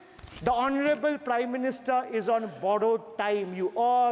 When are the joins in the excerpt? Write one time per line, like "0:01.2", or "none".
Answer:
none